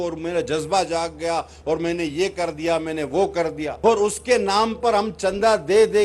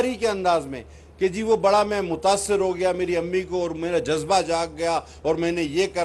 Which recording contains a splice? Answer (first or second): first